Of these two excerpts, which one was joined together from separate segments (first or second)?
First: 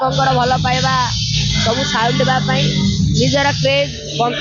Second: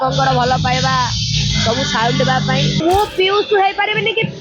second